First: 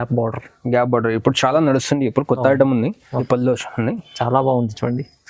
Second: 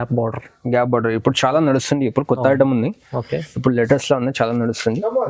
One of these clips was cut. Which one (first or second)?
first